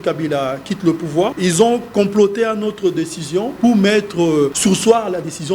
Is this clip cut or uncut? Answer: cut